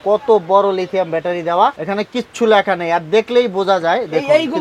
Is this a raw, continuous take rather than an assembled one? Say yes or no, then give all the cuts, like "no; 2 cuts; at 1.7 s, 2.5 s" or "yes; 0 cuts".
no; 1 cut; at 1.8 s